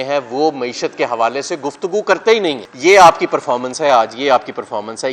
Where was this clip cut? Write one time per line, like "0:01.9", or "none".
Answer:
0:02.7